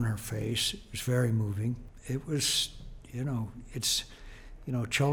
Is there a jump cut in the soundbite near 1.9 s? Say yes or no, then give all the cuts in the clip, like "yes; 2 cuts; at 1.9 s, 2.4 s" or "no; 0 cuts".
yes; 1 cut; at 1.9 s